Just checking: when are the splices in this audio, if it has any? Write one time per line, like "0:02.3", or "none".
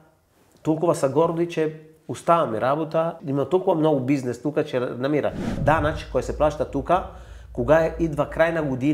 0:03.2
0:05.5